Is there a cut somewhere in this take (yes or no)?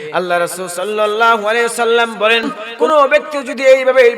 yes